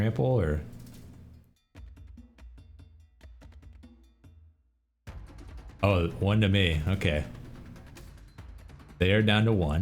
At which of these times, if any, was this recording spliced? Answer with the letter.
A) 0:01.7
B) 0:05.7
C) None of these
C